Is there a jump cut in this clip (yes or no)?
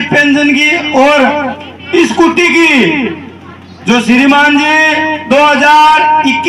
no